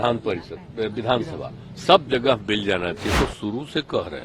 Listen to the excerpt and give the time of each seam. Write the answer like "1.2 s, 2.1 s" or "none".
3.1 s